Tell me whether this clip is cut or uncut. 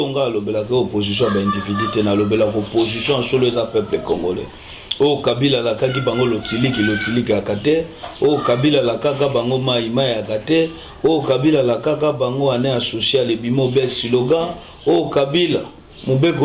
uncut